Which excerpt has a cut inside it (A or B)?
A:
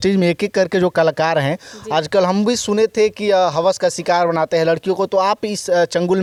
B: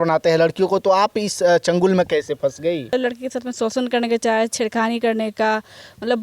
B